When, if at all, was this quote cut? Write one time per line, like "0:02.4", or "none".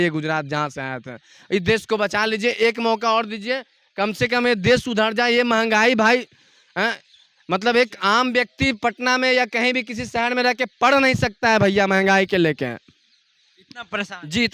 none